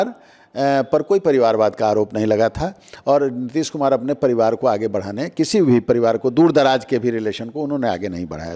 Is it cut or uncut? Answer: uncut